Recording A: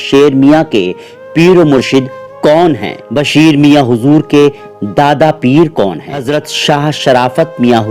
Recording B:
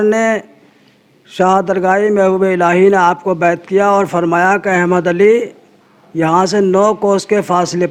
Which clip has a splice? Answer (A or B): A